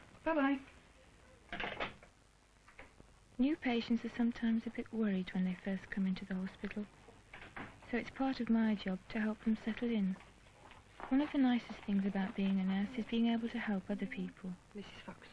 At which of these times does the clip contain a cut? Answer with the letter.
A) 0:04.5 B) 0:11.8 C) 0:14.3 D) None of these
C